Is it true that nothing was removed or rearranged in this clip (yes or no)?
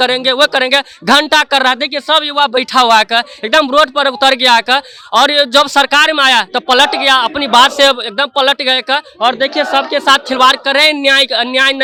yes